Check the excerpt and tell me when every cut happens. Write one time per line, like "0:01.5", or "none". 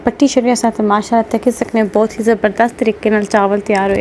none

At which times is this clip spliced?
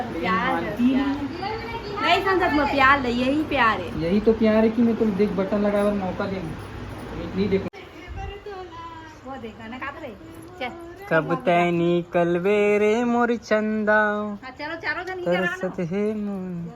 0:07.7

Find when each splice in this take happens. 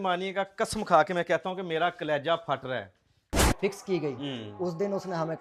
0:03.5

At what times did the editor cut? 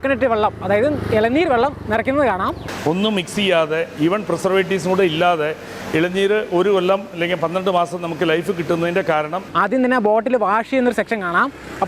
0:02.6
0:09.5

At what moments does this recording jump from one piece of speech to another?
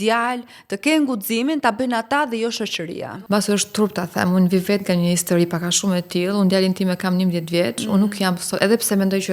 0:03.0

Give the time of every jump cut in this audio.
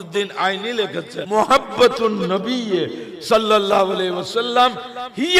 0:01.2

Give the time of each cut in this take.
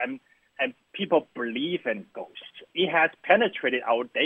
0:02.7

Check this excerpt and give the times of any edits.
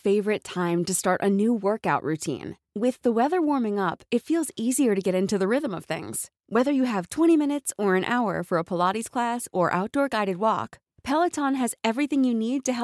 none

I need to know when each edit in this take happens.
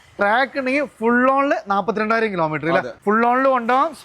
0:02.9

